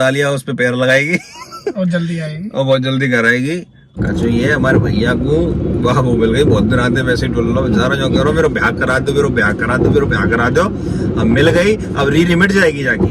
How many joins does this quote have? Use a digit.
1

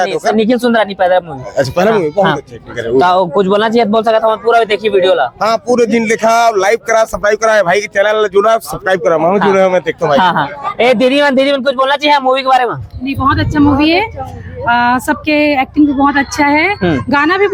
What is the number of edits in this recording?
0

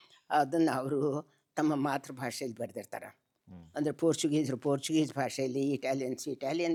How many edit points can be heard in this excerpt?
0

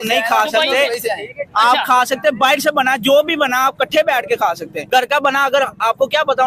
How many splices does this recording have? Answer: 1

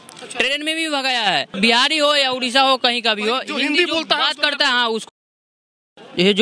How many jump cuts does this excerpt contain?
1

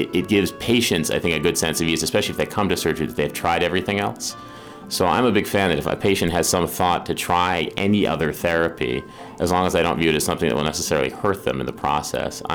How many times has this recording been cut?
0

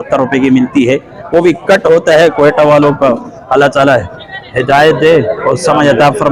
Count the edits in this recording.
0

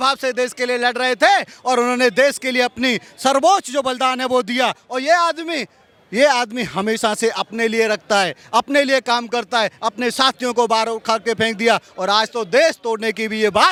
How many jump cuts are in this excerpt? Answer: 0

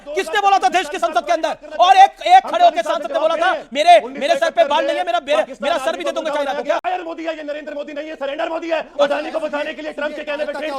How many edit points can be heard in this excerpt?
1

